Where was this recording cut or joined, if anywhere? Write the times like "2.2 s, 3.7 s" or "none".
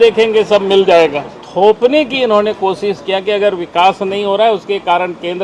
1.4 s